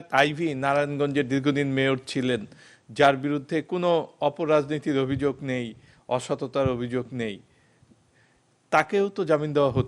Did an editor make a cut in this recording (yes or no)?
no